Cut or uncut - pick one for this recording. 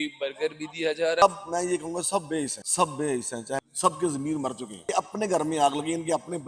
cut